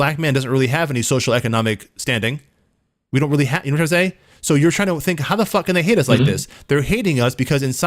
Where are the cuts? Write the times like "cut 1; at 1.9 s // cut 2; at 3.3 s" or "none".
none